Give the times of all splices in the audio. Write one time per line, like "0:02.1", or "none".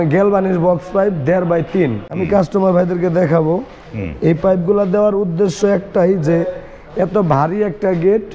0:02.2
0:03.8